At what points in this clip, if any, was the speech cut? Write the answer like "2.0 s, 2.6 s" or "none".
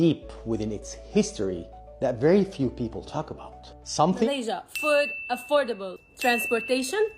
4.3 s